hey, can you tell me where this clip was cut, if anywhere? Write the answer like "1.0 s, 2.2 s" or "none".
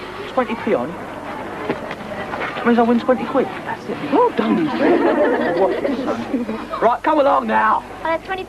4.0 s